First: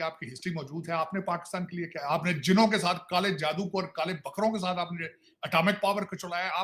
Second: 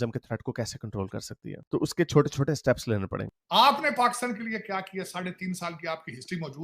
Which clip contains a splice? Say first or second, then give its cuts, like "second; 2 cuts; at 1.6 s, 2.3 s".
second; 1 cut; at 3.4 s